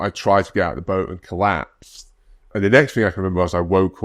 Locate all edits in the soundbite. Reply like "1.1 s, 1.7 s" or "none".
2.5 s